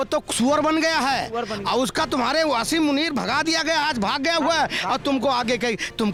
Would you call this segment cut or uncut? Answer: uncut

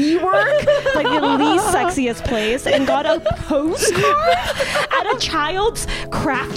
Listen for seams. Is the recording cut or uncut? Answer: uncut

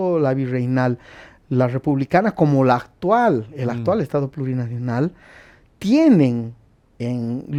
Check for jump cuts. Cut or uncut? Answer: uncut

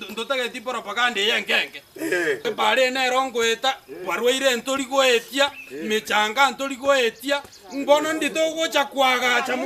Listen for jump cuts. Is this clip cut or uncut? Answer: cut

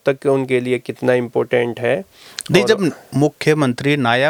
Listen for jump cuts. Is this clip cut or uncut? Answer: uncut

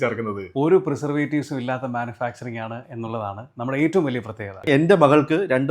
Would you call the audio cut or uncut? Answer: cut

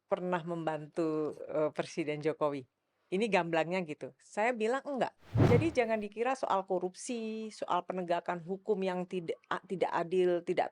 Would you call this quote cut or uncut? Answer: cut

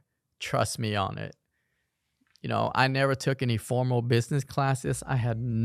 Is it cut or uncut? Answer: uncut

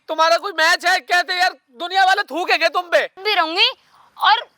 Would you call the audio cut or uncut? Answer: cut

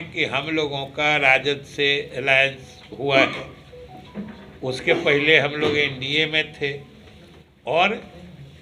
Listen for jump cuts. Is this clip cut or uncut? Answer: uncut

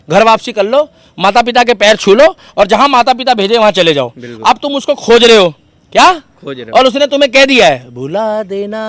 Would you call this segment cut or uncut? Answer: uncut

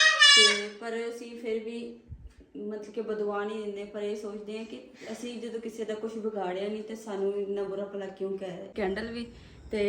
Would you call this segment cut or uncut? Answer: cut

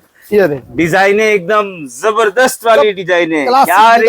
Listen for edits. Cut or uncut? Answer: uncut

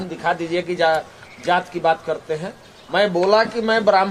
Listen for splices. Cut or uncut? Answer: uncut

